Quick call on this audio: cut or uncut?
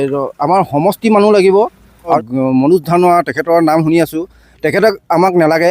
cut